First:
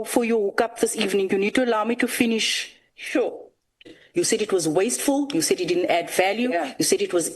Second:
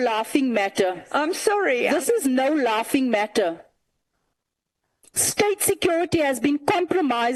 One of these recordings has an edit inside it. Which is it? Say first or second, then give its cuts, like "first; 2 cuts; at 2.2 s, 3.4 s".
first; 1 cut; at 4.0 s